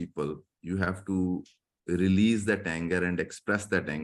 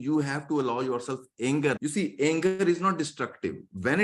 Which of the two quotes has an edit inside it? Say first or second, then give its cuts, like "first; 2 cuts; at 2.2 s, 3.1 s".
second; 1 cut; at 1.8 s